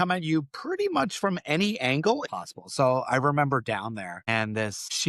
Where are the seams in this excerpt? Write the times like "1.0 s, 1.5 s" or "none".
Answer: 2.2 s